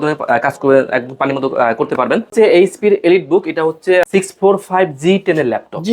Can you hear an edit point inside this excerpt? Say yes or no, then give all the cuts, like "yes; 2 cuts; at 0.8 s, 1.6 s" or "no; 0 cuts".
yes; 2 cuts; at 2.3 s, 4.1 s